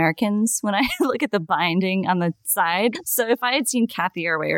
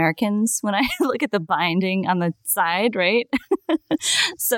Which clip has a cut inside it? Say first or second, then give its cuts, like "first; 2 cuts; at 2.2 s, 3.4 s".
first; 1 cut; at 2.9 s